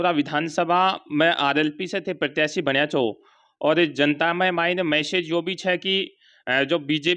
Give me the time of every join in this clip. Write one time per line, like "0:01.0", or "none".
none